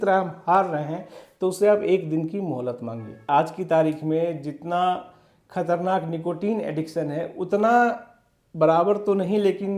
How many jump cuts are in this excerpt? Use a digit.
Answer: 1